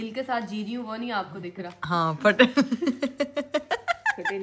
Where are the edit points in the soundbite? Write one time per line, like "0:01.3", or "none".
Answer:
none